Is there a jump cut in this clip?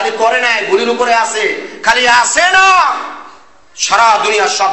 no; 0 cuts

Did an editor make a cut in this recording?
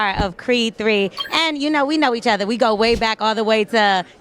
no; 0 cuts

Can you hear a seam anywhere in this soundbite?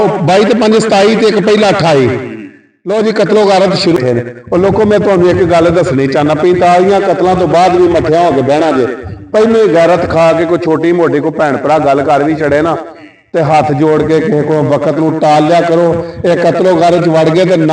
yes; 1 cut; at 4.0 s

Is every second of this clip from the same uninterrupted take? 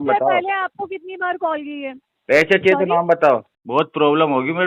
no; 1 cut; at 3.6 s

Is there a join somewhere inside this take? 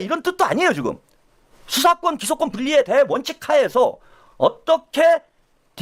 no; 0 cuts

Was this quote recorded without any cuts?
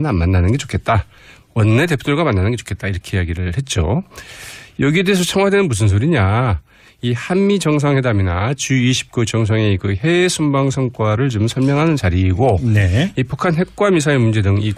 yes; 0 cuts

